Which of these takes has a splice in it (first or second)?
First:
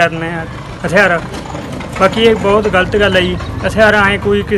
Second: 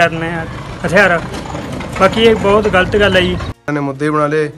second